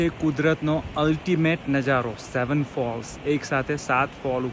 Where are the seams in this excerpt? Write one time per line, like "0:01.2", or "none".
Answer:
none